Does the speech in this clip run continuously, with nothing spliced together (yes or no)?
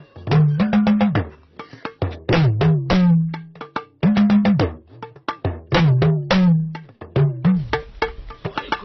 no